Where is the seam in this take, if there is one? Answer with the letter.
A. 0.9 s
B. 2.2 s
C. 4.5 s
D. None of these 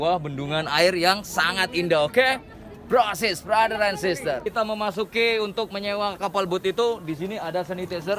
C